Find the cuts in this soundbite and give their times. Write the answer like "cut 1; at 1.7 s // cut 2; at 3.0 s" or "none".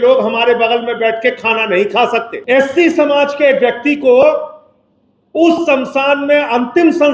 cut 1; at 2.3 s